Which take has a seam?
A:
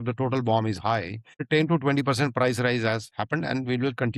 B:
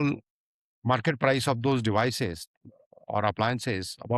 A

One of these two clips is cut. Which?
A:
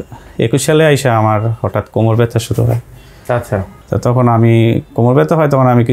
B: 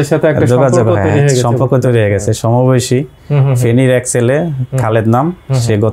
A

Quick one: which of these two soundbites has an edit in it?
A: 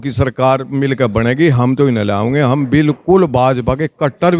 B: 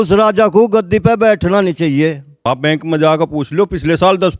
B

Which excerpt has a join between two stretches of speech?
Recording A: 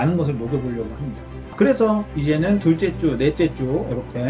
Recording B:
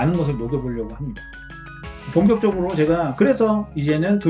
A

